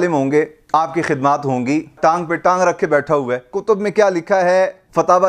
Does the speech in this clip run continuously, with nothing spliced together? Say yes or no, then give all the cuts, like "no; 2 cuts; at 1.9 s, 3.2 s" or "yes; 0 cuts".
no; 2 cuts; at 2.0 s, 3.5 s